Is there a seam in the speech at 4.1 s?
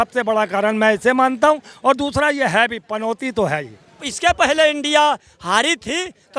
yes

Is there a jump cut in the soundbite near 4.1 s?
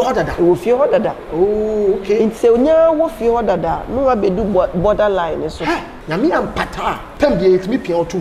no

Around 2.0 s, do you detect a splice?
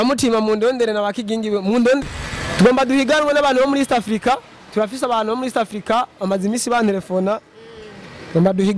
yes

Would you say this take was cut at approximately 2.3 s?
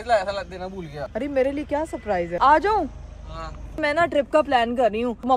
yes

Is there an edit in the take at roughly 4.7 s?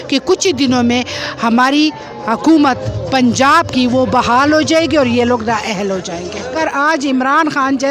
no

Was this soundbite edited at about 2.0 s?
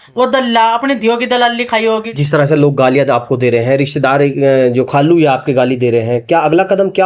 no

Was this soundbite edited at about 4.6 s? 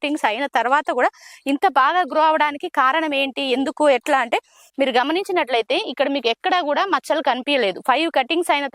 yes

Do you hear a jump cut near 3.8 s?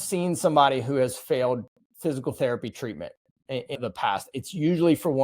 yes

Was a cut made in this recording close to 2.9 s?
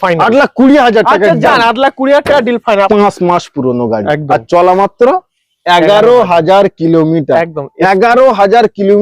yes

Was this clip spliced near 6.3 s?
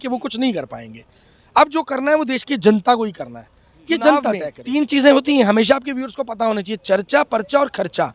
no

